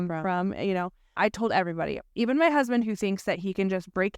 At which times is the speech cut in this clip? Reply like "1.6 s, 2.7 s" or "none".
1.1 s

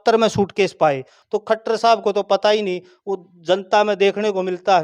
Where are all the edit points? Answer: 1.1 s

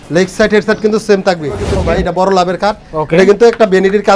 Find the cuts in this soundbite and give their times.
1.7 s

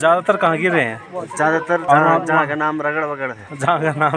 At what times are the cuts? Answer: 1.8 s

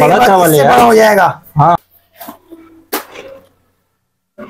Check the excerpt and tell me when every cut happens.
1.8 s

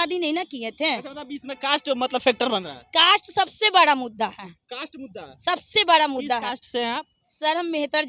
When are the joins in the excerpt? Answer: none

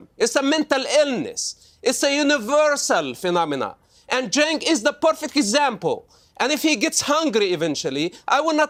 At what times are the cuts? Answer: none

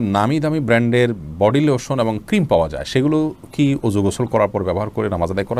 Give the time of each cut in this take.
none

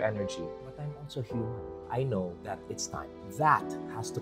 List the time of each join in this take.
1.7 s, 3.2 s

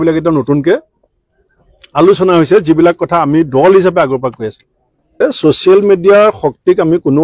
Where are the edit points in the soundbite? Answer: 5.2 s

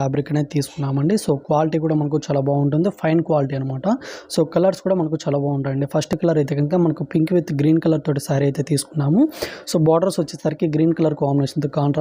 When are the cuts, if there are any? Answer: none

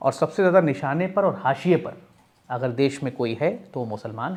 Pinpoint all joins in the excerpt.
none

